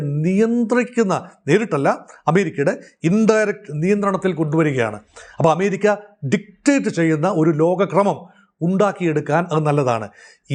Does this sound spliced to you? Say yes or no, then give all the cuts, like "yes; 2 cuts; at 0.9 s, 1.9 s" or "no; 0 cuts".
no; 0 cuts